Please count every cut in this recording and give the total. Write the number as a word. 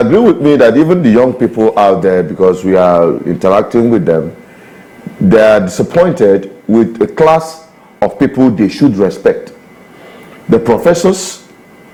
zero